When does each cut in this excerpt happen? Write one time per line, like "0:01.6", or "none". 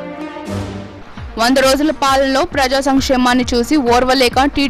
0:00.9